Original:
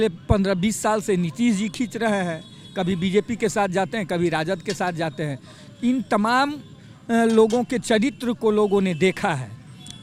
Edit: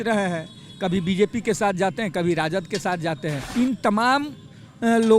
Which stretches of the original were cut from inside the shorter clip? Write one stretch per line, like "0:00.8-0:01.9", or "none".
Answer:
0:05.4-0:05.7